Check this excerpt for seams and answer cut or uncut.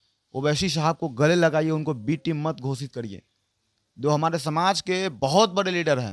uncut